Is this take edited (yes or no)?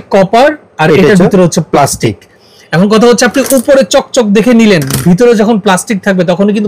no